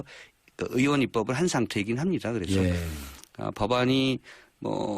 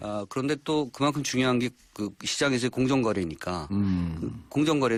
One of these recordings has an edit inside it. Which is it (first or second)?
first